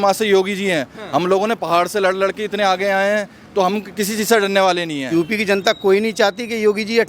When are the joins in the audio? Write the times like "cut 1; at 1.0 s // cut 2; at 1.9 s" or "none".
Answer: cut 1; at 5.1 s